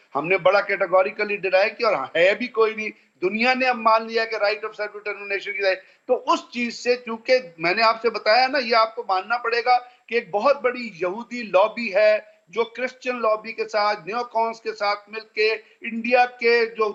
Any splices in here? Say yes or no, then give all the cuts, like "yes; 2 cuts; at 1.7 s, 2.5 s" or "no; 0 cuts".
no; 0 cuts